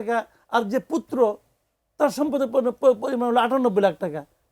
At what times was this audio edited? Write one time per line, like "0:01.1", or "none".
none